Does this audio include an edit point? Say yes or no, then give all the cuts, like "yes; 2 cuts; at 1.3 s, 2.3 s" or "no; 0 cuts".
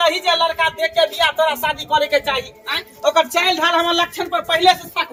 no; 0 cuts